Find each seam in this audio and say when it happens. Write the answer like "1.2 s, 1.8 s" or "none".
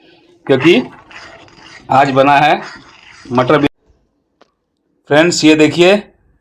3.7 s